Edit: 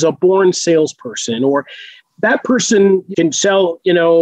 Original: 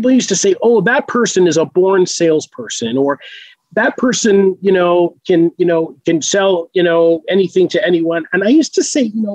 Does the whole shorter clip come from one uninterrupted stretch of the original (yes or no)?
no